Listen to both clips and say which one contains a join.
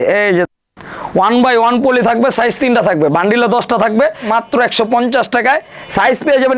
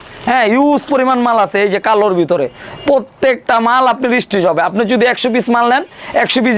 first; 1 cut; at 4.3 s

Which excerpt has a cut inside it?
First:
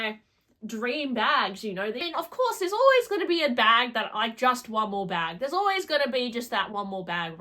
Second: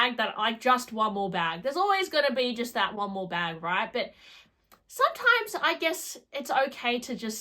first; 1 cut; at 2.0 s

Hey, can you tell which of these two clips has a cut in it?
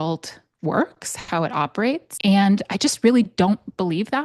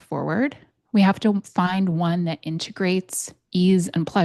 first; 1 cut; at 2.1 s

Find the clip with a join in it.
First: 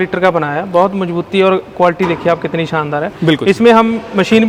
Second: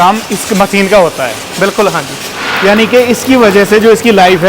second; 1 cut; at 2.5 s

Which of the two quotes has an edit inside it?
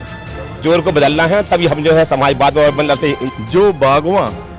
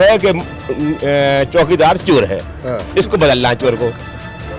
first; 1 cut; at 3.3 s

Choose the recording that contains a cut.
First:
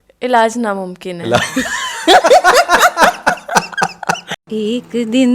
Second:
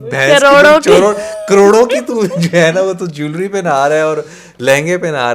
first; 1 cut; at 4.3 s

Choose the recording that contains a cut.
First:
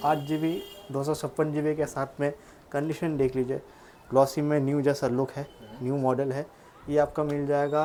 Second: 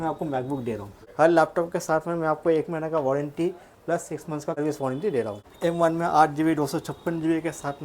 second; 3 cuts; at 1.0 s, 4.6 s, 5.4 s

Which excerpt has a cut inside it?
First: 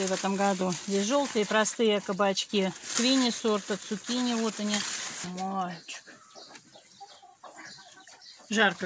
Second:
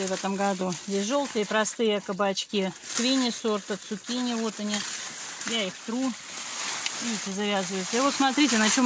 first; 1 cut; at 5.2 s

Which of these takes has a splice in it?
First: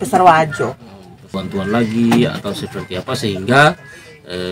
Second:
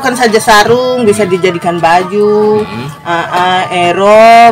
first; 1 cut; at 1.3 s

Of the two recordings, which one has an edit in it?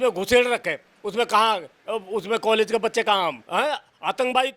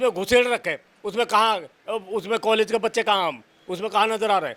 first; 1 cut; at 3.4 s

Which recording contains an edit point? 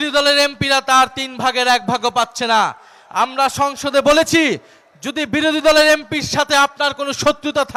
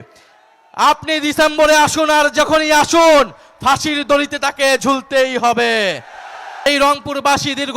second; 1 cut; at 6.7 s

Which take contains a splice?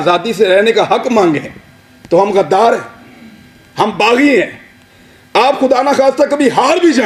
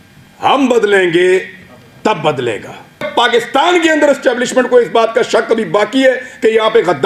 second; 1 cut; at 3.0 s

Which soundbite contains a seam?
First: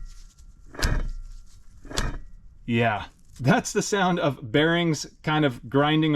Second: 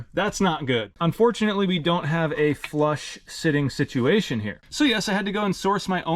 second; 2 cuts; at 0.9 s, 4.6 s

